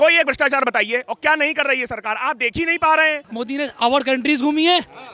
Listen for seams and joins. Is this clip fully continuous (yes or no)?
no